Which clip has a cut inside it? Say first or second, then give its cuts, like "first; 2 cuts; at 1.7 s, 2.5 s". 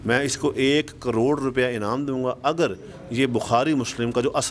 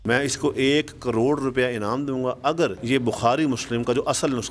second; 1 cut; at 2.8 s